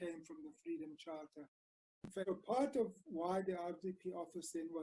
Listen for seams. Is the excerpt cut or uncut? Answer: cut